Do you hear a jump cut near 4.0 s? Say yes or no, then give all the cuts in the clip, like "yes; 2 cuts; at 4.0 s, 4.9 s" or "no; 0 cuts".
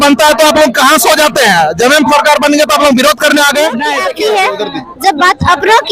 yes; 1 cut; at 4.0 s